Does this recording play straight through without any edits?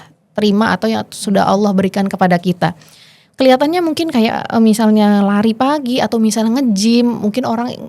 yes; 0 cuts

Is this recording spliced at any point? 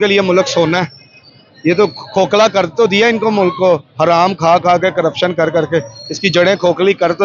no; 0 cuts

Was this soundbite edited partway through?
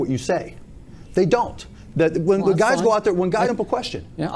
yes; 2 cuts; at 1.0 s, 3.4 s

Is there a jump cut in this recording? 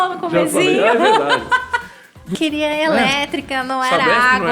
yes; 1 cut; at 2.3 s

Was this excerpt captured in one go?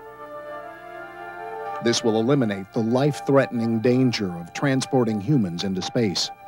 yes; 0 cuts

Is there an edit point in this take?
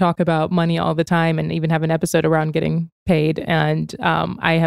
no; 0 cuts

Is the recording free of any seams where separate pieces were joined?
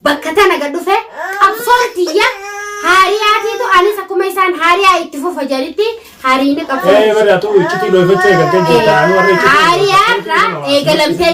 yes; 0 cuts

